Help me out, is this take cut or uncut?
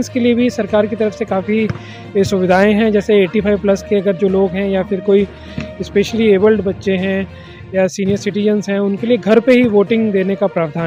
uncut